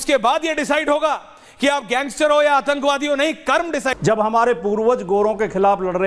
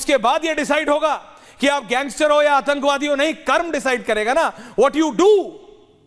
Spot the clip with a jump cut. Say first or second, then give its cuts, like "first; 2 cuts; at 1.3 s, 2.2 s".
first; 1 cut; at 4.0 s